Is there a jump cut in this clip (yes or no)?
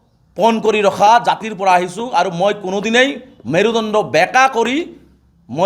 no